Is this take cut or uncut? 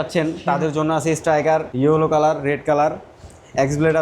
cut